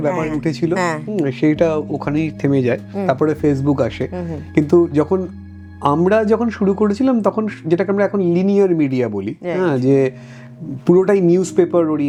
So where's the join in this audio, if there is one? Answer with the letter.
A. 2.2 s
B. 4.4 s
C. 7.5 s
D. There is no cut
D